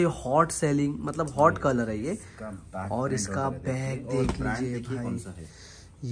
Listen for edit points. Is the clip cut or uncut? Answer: uncut